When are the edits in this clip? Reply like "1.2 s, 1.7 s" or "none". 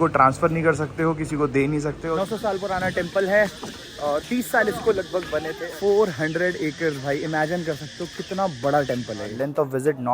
2.0 s, 5.6 s, 9.3 s